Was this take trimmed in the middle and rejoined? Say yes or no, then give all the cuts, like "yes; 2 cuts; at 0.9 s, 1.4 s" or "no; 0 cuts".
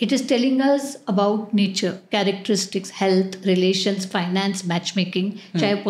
no; 0 cuts